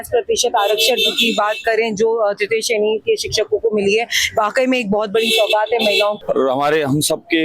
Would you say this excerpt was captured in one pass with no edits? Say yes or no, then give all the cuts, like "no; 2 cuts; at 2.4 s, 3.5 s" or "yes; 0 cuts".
no; 1 cut; at 6.2 s